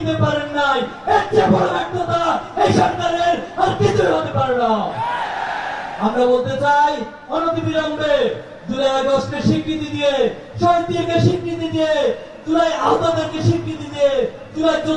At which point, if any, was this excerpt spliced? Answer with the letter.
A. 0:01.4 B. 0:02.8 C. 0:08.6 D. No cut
D